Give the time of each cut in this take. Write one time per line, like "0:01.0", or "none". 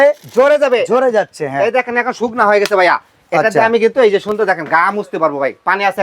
none

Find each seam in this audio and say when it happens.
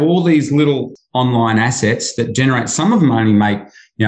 0:01.0

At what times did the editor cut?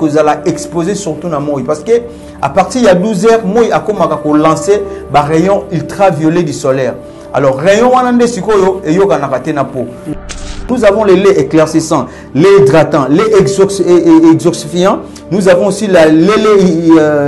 0:10.4

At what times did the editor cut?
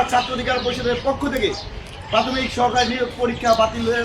0:00.9

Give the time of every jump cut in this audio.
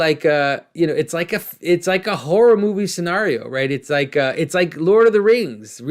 none

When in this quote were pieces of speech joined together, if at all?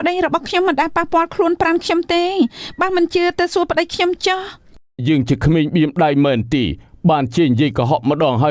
0:05.0

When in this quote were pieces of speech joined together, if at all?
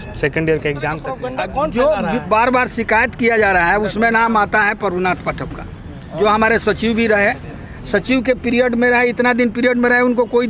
0:01.3

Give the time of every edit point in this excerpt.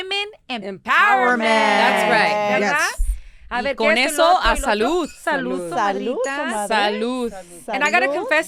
none

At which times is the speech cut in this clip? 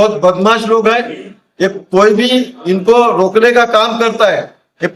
none

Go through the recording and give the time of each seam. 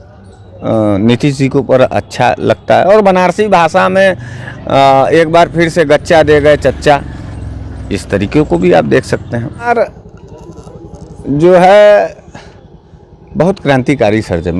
0:09.7

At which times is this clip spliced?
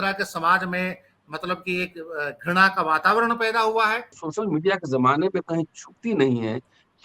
0:04.1

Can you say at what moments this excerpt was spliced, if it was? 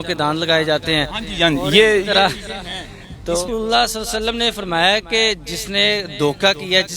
0:03.5

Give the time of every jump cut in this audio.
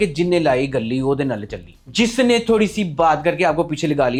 none

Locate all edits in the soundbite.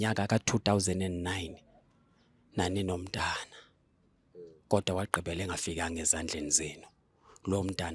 none

